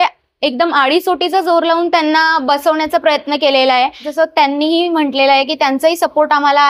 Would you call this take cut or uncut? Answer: cut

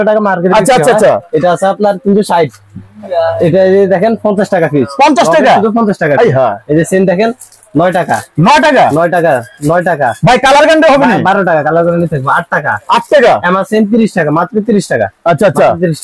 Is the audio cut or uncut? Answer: uncut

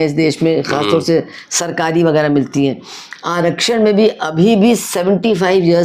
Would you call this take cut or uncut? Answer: uncut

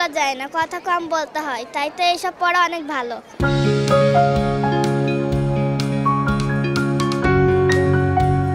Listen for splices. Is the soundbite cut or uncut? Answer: cut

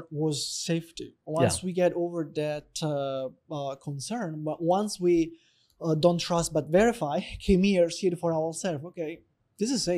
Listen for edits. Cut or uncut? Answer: uncut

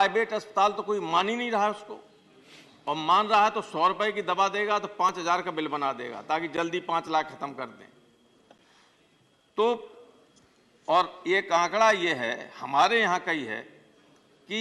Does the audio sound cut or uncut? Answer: uncut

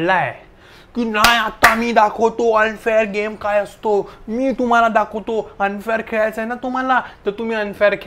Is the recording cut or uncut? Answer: uncut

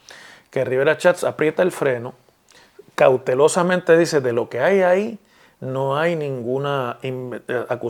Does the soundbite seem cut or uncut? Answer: uncut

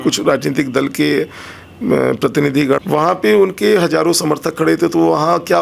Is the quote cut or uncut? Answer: cut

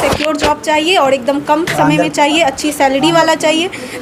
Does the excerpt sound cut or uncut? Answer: uncut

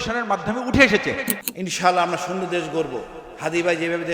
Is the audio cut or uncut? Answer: cut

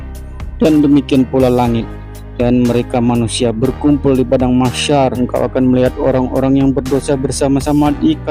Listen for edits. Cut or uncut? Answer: cut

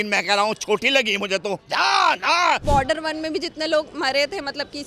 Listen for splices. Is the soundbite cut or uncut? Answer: cut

